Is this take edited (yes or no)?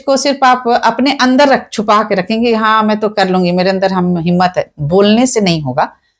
no